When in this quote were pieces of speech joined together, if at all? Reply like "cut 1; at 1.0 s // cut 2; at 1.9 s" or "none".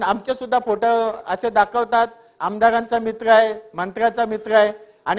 none